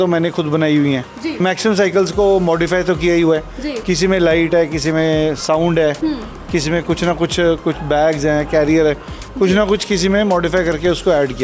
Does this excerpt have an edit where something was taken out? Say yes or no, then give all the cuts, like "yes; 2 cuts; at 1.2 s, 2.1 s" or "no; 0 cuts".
yes; 1 cut; at 1.4 s